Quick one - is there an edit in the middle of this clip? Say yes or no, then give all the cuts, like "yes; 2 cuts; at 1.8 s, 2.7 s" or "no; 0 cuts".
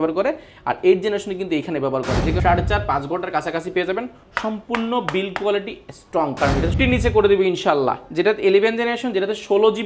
yes; 2 cuts; at 2.4 s, 6.7 s